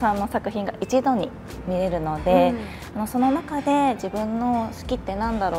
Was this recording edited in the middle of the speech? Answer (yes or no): no